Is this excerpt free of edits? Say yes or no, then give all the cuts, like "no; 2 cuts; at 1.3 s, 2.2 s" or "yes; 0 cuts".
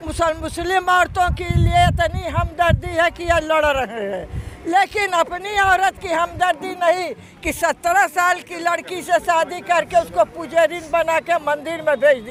yes; 0 cuts